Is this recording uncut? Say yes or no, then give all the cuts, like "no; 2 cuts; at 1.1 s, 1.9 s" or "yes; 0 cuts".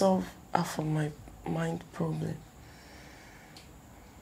yes; 0 cuts